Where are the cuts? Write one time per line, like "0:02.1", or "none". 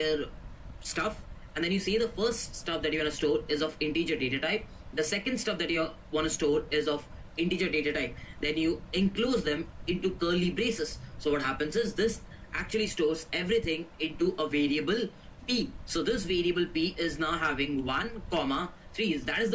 none